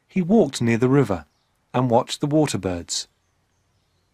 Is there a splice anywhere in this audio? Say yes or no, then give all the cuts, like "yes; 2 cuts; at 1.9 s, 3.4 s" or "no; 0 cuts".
yes; 1 cut; at 2.1 s